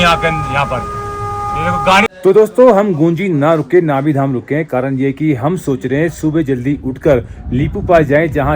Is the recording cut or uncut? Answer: cut